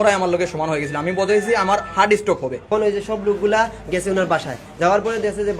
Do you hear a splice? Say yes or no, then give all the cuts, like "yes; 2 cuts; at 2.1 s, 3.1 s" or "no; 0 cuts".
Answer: yes; 1 cut; at 2.7 s